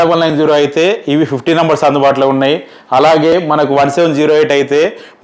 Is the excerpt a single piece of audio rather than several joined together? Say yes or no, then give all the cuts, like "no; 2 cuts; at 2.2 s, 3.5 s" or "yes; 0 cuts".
yes; 0 cuts